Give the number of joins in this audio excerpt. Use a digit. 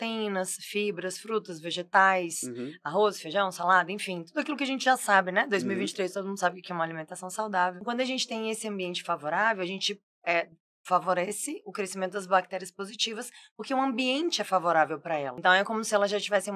2